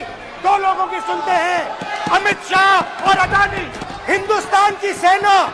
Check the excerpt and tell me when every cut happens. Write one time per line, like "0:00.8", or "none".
0:03.8